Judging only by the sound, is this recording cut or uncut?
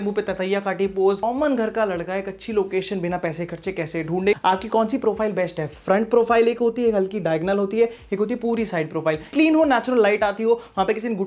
cut